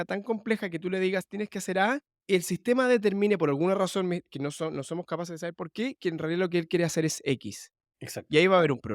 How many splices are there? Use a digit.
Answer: 1